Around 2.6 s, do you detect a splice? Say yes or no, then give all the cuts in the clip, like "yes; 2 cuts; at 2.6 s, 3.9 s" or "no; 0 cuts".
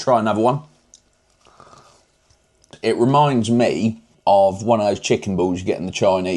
yes; 2 cuts; at 2.6 s, 4.1 s